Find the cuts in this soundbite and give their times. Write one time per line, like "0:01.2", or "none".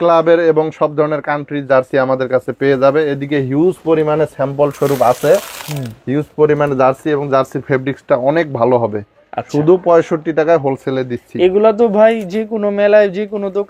none